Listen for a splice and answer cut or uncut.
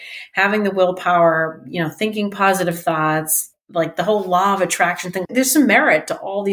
cut